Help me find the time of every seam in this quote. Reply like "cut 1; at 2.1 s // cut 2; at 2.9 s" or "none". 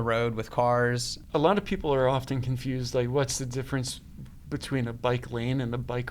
cut 1; at 1.1 s